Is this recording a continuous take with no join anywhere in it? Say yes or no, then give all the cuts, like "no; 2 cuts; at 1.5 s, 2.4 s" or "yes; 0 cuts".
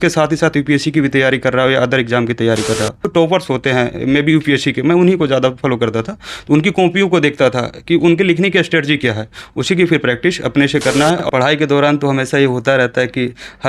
no; 2 cuts; at 3.1 s, 11.2 s